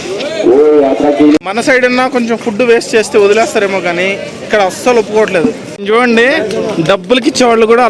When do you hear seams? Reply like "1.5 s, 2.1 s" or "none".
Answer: 1.0 s, 5.7 s